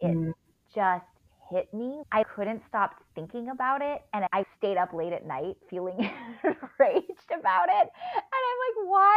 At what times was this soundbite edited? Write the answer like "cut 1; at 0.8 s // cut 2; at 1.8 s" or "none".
cut 1; at 2.2 s // cut 2; at 4.3 s // cut 3; at 5.6 s